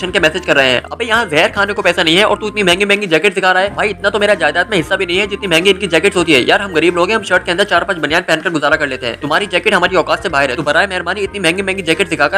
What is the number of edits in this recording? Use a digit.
0